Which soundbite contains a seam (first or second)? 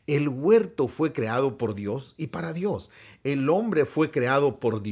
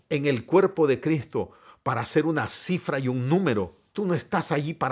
second